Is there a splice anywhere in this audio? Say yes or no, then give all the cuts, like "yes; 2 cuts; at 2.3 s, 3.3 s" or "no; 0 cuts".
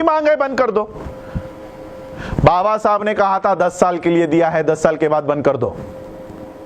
no; 0 cuts